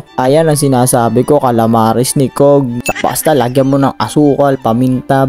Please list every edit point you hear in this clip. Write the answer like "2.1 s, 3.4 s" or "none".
2.9 s

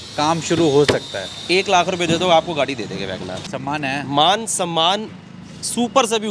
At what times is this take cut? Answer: 3.4 s

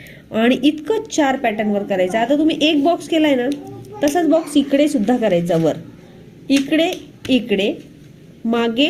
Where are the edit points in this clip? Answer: none

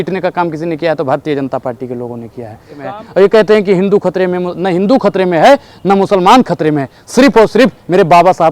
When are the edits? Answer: 3.0 s

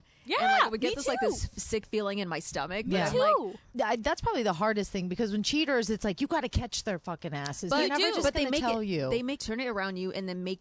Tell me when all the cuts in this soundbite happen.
3.7 s, 9.4 s

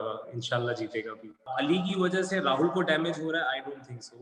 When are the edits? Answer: 1.5 s

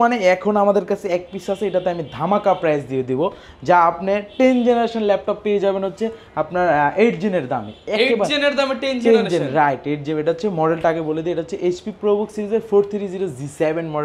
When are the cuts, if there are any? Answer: none

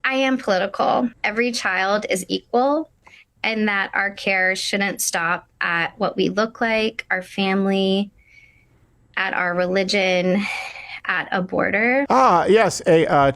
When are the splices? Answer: 1.2 s, 12.1 s

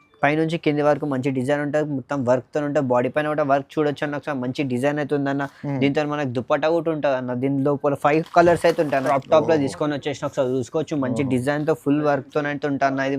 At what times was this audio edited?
9.1 s

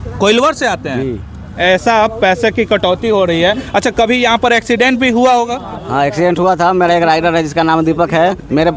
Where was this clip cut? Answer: 1.5 s

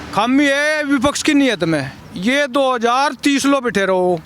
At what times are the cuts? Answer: 2.0 s

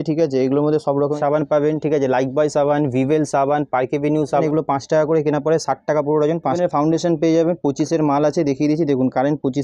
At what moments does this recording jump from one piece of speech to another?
1.1 s, 4.4 s, 6.6 s

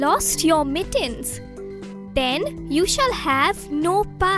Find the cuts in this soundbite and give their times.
none

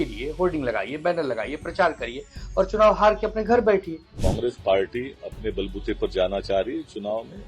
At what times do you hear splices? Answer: 4.2 s

